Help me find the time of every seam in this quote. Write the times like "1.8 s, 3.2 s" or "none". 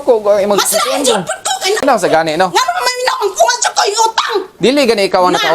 1.8 s